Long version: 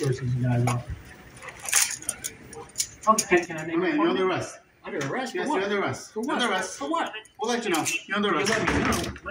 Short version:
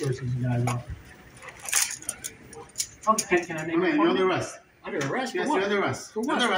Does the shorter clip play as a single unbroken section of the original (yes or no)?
yes